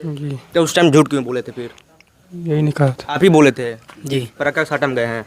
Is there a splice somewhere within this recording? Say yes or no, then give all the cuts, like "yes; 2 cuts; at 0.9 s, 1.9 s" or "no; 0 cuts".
yes; 1 cut; at 3.2 s